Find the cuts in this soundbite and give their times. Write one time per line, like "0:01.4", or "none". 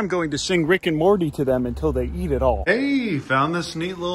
none